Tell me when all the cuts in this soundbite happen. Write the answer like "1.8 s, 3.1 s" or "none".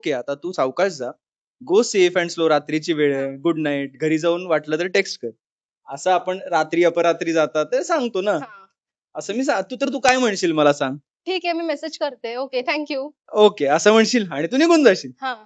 none